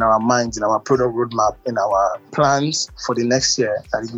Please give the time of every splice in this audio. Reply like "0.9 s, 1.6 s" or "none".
2.0 s